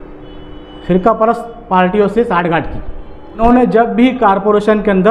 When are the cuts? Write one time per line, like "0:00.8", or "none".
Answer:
0:03.4